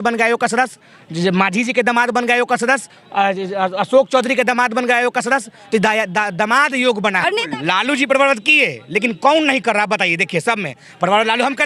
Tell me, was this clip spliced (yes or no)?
yes